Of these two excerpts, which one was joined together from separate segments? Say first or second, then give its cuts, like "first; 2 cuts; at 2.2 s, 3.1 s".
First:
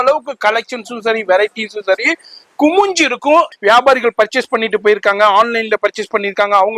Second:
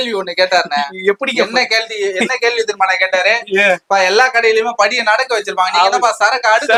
first; 1 cut; at 3.5 s